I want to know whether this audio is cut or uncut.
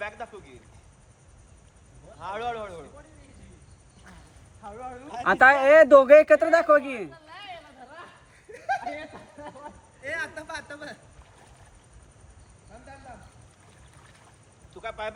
uncut